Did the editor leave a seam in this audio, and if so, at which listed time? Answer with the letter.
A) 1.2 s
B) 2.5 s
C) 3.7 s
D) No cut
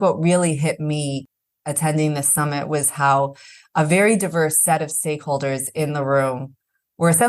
A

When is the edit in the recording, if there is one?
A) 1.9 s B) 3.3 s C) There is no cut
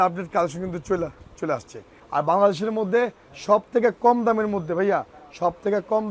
A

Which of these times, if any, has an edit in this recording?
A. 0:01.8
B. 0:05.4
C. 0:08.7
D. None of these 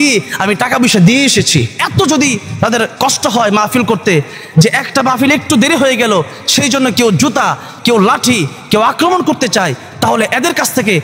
A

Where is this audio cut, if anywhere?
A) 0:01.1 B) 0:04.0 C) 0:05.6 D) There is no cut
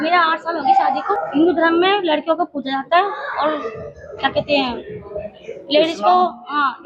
A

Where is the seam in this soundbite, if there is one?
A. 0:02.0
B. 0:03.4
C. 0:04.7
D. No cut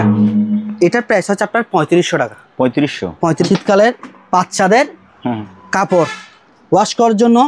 B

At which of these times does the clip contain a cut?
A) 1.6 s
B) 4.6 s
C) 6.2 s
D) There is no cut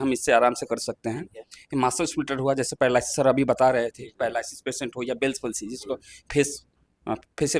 D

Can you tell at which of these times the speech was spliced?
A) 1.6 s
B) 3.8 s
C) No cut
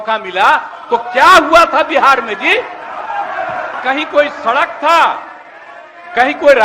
B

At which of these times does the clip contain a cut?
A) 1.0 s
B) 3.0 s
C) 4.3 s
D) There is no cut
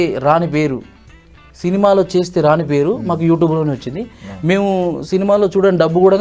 D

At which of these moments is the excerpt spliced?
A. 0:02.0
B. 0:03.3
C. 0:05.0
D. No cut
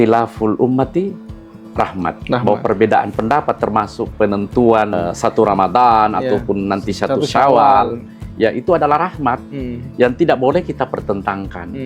C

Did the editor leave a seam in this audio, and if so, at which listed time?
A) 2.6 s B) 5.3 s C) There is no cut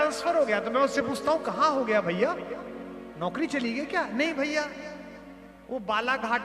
C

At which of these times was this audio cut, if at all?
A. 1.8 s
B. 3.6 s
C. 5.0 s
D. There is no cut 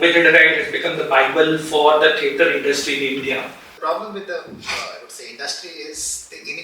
B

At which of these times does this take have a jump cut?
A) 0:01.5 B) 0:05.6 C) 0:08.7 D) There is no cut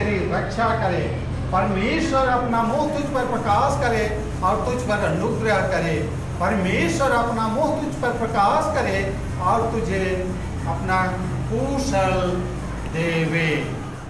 D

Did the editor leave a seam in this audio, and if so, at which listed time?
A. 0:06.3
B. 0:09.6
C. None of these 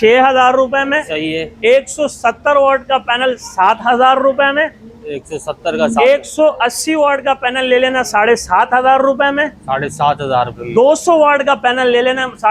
C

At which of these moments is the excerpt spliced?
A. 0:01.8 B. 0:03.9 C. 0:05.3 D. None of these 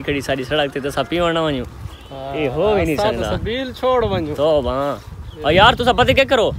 D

